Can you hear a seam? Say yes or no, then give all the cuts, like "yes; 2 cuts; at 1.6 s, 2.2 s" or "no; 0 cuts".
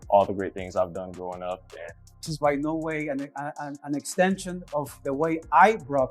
yes; 1 cut; at 2.3 s